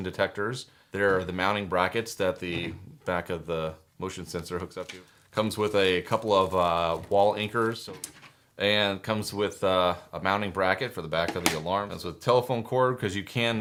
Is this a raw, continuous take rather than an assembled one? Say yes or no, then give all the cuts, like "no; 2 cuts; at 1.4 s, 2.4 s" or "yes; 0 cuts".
yes; 0 cuts